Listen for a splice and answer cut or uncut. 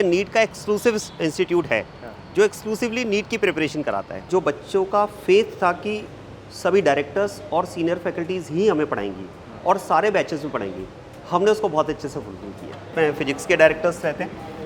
cut